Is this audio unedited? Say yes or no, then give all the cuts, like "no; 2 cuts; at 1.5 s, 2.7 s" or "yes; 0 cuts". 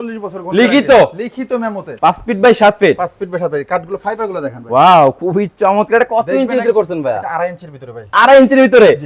no; 1 cut; at 1.8 s